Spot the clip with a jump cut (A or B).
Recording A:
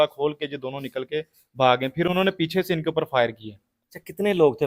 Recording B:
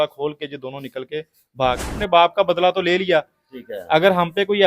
B